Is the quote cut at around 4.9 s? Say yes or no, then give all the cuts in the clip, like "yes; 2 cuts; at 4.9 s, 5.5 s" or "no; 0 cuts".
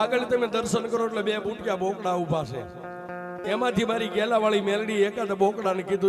no; 0 cuts